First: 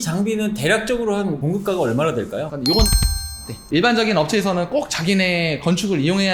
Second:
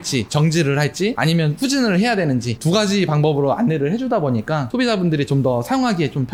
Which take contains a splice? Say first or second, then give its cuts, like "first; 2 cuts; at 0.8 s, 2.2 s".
first; 1 cut; at 3.0 s